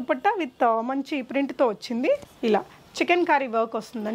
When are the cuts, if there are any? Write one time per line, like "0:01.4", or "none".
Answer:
0:02.3